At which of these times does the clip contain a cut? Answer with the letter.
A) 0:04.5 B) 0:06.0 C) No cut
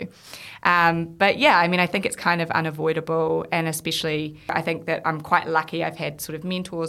A